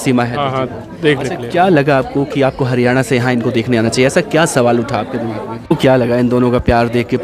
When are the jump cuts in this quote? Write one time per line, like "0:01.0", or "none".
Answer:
0:05.7